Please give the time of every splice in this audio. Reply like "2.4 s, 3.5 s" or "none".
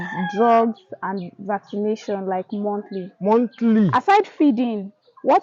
3.9 s